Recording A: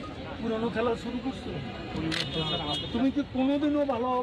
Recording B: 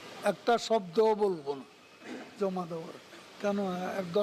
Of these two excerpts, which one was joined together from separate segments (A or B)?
B